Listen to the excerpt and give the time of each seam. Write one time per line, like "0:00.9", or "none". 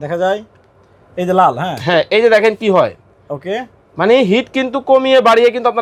none